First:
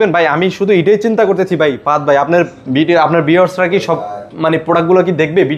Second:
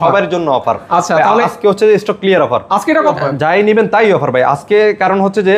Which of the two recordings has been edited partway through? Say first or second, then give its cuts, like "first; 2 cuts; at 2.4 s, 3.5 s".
second; 1 cut; at 3.2 s